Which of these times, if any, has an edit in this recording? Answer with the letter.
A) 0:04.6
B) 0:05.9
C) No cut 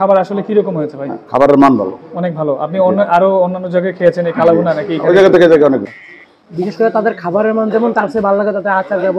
B